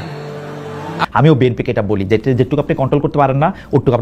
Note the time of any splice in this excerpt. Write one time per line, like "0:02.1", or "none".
0:01.0